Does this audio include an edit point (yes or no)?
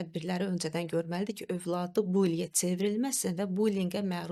no